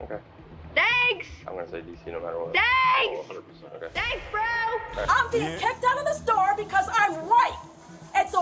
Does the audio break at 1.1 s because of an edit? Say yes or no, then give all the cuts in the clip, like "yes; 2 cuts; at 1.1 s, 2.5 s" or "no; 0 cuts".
no; 1 cut; at 5.0 s